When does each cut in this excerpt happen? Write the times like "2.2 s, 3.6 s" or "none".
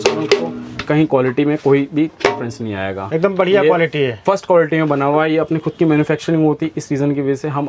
none